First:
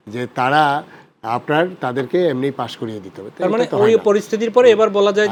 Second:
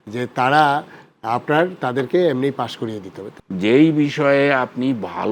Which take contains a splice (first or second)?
second